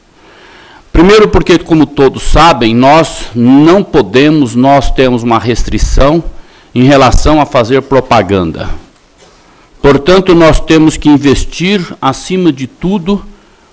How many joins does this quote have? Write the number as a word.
one